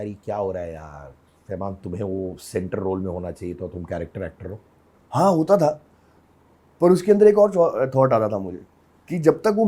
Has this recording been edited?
no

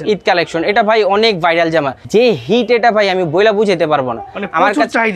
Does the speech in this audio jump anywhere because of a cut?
no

